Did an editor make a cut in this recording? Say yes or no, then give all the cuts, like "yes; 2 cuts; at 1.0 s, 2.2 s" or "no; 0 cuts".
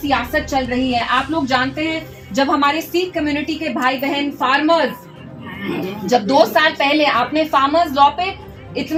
no; 0 cuts